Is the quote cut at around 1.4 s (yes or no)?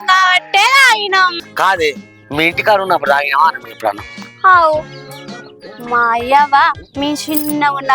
yes